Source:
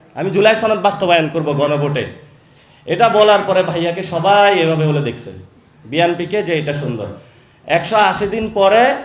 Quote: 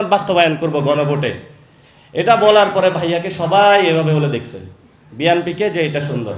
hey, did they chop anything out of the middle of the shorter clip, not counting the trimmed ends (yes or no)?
no